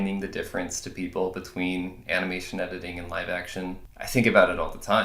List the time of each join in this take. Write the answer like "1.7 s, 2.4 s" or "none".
3.9 s